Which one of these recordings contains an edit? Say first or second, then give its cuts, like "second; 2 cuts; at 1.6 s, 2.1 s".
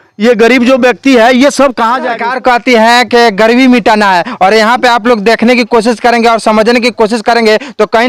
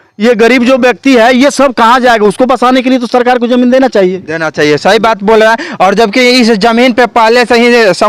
first; 1 cut; at 2.1 s